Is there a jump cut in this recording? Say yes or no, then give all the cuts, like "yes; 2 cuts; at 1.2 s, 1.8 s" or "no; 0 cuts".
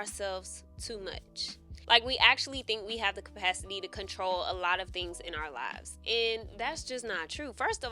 yes; 1 cut; at 1.7 s